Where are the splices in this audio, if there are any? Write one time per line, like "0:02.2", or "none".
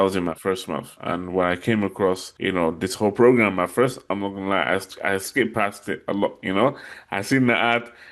0:00.9
0:02.3